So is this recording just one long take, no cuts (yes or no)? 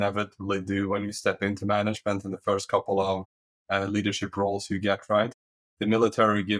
yes